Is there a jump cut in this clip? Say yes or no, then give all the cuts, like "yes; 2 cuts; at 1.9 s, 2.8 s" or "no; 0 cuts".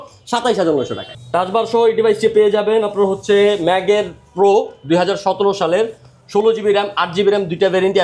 yes; 1 cut; at 1.1 s